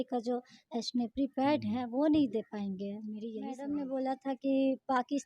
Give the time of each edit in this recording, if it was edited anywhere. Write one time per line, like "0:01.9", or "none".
0:03.5